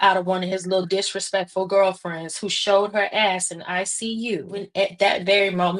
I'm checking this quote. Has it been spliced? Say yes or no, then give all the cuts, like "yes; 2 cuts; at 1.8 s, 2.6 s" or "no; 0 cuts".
yes; 1 cut; at 4.7 s